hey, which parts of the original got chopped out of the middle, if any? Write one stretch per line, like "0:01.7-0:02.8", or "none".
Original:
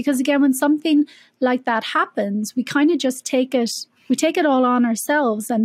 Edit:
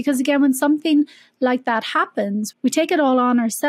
0:02.5-0:03.9